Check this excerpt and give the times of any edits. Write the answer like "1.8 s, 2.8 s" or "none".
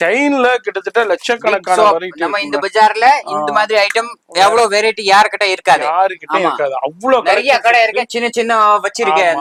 none